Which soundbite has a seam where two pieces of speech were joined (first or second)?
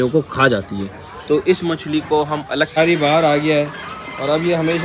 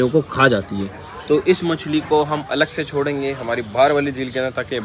first